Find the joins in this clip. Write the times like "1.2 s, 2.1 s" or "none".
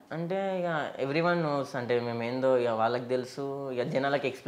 none